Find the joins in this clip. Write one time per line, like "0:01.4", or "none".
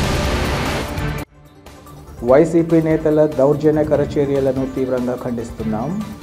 0:01.1